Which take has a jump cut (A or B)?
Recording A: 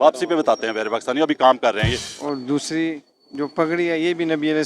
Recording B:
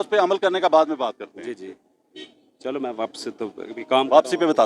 A